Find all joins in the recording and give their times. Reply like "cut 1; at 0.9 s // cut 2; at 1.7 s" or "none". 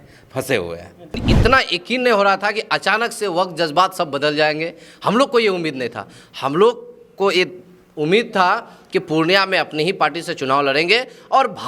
cut 1; at 1.2 s